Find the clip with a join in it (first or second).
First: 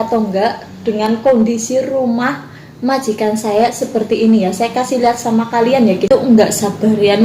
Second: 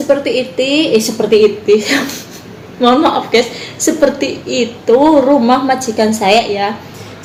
first